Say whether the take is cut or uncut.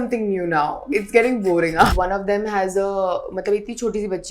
cut